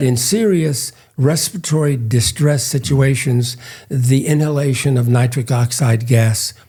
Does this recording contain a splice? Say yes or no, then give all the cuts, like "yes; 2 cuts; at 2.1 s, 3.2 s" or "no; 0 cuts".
no; 0 cuts